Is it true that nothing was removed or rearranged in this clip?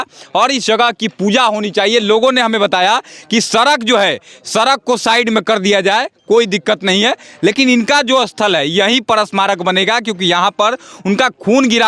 yes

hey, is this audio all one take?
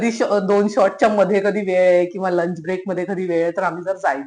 yes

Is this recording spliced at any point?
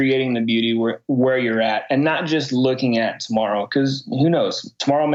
no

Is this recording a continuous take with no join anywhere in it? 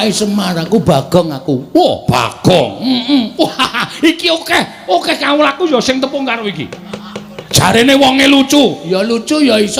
yes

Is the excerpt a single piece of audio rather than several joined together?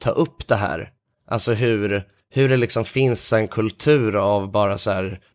no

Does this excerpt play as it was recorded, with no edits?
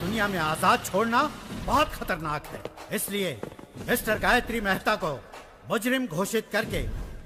yes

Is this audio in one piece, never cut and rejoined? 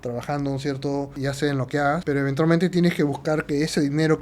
no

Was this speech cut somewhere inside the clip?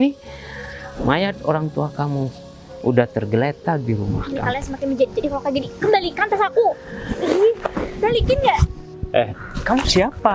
no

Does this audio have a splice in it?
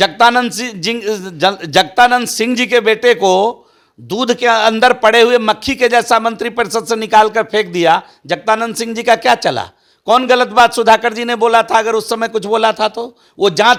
no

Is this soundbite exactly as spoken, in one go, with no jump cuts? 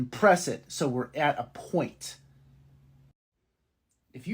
no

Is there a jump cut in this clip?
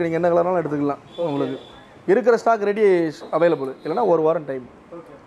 no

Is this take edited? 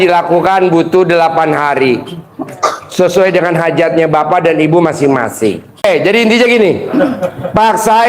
yes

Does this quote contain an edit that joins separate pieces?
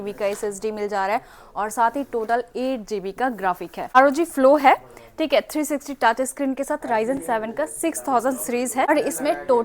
yes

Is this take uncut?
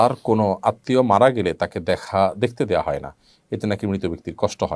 yes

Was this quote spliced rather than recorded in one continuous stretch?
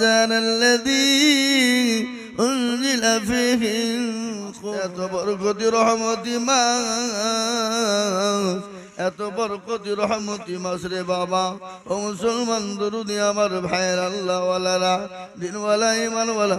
yes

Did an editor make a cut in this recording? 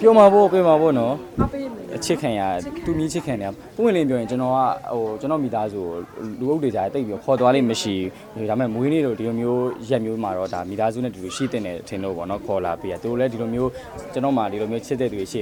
no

